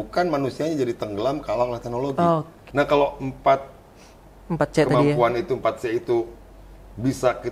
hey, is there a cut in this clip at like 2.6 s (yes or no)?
yes